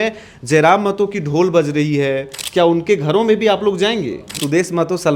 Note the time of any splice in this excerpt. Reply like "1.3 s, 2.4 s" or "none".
2.3 s, 4.4 s